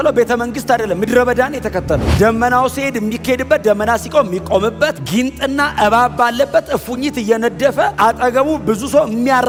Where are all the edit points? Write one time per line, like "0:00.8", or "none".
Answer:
none